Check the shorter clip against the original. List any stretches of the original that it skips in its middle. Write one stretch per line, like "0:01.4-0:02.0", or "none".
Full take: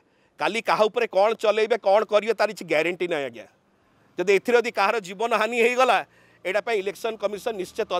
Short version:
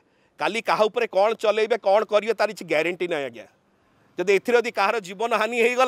none